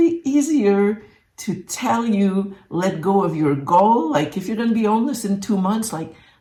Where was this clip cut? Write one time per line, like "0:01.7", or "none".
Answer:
none